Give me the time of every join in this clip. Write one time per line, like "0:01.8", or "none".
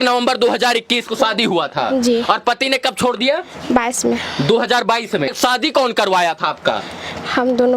0:05.3